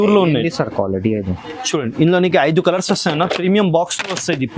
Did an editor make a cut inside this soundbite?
no; 0 cuts

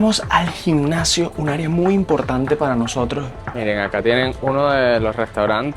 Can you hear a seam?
yes; 1 cut; at 3.3 s

